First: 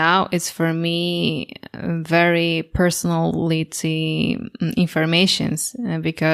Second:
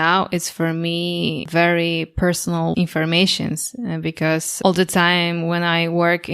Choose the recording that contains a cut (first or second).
second